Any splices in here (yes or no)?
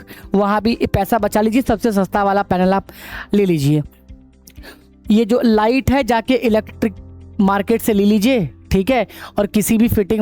no